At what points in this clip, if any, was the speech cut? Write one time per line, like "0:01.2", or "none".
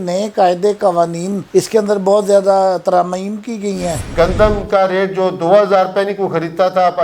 0:04.0